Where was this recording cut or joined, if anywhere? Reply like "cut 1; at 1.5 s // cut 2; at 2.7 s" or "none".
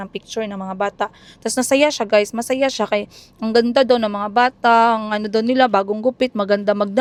none